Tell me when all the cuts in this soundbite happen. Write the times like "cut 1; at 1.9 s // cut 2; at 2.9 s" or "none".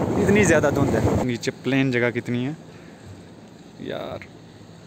cut 1; at 1.2 s

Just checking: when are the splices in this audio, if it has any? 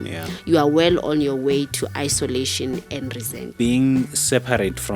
cut 1; at 3.4 s

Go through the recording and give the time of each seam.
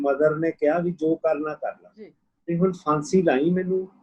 cut 1; at 2.3 s

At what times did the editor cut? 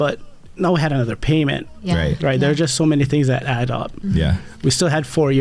none

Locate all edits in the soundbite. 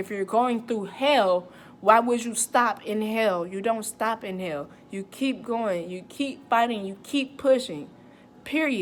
none

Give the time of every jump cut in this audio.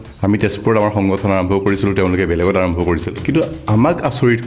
cut 1; at 3.1 s

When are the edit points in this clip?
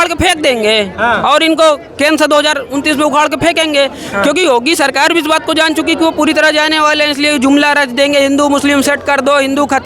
none

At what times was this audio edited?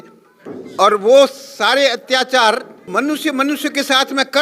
cut 1; at 2.8 s

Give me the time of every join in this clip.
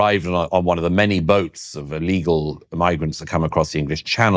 none

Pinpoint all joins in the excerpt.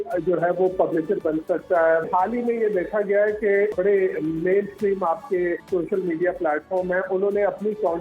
cut 1; at 2.1 s // cut 2; at 3.7 s // cut 3; at 5.6 s

